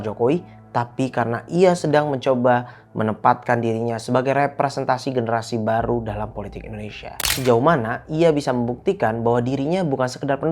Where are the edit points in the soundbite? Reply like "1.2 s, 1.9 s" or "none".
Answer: 7.4 s